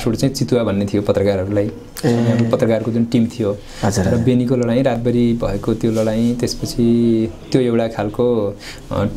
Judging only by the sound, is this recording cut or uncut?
uncut